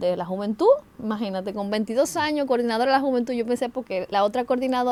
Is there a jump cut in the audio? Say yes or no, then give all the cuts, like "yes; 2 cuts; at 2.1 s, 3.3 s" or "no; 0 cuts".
no; 0 cuts